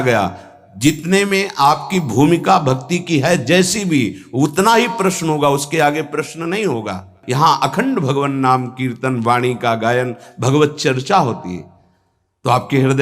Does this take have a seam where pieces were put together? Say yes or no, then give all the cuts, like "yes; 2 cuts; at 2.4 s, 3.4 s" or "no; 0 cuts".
yes; 1 cut; at 7.2 s